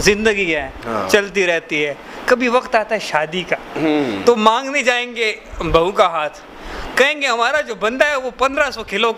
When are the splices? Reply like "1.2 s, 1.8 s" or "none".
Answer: none